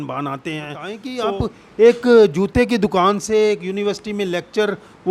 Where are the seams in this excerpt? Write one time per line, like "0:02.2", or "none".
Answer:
0:01.1